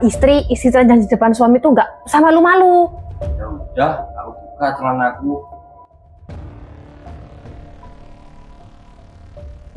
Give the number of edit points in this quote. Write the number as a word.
two